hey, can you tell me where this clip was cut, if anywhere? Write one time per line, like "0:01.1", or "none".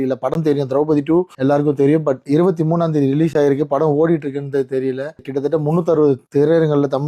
0:01.3
0:05.3
0:06.2